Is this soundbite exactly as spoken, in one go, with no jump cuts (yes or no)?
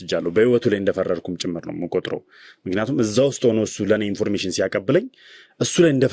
yes